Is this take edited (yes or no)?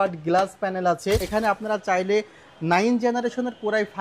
yes